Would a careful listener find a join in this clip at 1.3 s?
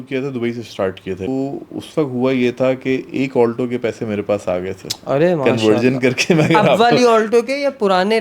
yes; 1 cut; at 1.3 s

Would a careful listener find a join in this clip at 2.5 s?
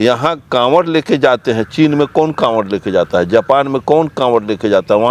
no; 0 cuts

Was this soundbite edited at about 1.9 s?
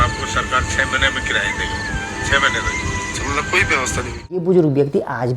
no; 1 cut; at 4.4 s

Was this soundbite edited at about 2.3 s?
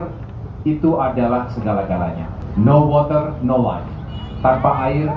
yes; 1 cut; at 2.3 s

